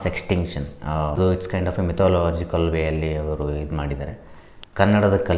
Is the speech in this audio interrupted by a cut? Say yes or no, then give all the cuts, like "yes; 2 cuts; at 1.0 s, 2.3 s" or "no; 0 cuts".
yes; 1 cut; at 1.2 s